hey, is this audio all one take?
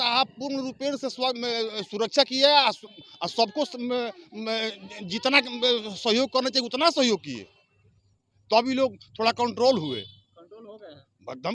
yes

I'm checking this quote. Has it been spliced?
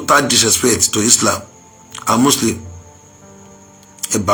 no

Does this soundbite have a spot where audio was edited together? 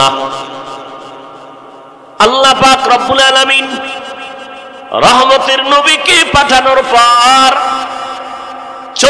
yes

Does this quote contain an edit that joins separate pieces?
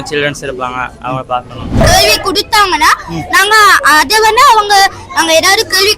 yes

